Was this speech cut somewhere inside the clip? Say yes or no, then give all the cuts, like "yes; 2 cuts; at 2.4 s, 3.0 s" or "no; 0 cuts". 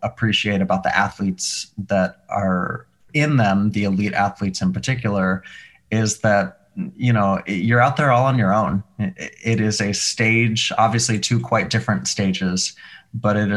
no; 0 cuts